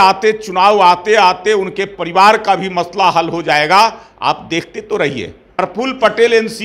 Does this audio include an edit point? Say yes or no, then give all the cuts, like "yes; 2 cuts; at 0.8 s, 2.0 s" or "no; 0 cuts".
yes; 1 cut; at 5.4 s